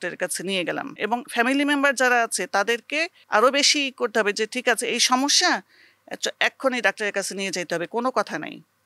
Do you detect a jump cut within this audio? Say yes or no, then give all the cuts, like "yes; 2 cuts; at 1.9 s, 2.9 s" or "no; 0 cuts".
yes; 2 cuts; at 1.0 s, 3.1 s